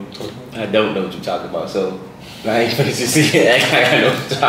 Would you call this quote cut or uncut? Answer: uncut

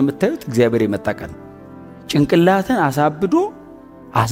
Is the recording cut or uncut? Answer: uncut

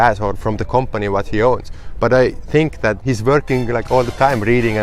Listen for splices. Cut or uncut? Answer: cut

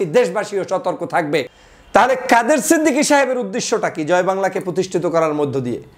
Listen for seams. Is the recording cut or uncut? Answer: cut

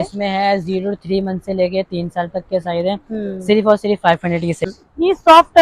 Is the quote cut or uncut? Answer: cut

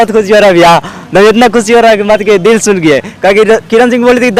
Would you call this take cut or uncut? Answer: uncut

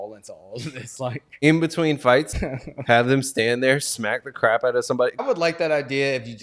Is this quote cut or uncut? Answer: cut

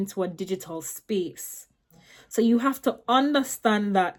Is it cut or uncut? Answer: uncut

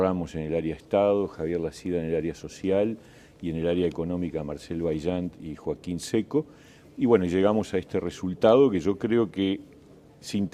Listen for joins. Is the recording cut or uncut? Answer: cut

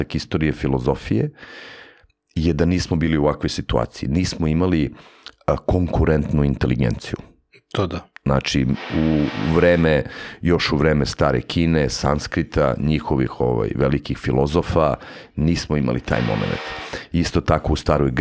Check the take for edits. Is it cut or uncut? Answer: uncut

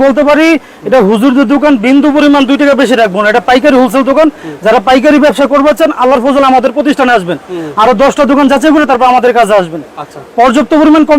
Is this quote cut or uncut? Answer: uncut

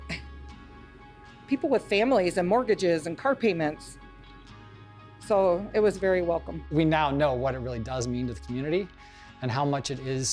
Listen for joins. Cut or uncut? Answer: cut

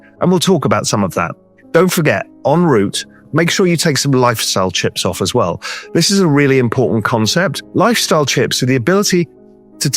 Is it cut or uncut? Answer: cut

